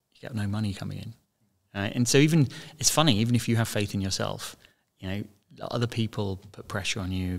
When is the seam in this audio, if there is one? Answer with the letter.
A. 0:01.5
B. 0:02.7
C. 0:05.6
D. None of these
D